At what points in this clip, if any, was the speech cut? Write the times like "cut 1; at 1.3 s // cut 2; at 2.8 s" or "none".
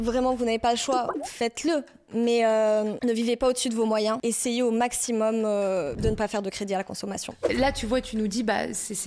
cut 1; at 1.2 s // cut 2; at 4.2 s // cut 3; at 6.0 s // cut 4; at 7.5 s